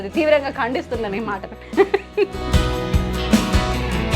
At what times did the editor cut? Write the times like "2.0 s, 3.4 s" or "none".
2.4 s